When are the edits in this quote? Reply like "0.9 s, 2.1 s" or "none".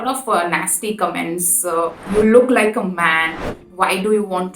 2.0 s, 3.6 s

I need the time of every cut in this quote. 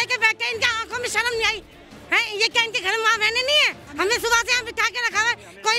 3.8 s

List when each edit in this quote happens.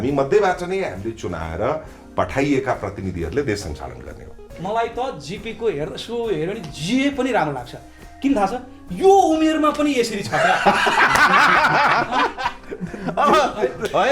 4.5 s

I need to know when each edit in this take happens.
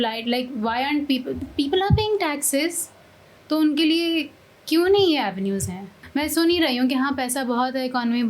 5.9 s

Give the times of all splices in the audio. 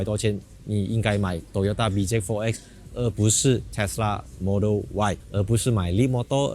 5.3 s

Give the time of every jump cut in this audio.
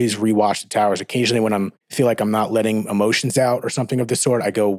1.8 s

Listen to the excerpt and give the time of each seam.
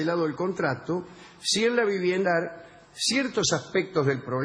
none

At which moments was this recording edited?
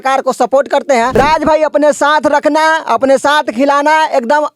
1.1 s

